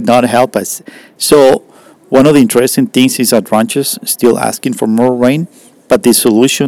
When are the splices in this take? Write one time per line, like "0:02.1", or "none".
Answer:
none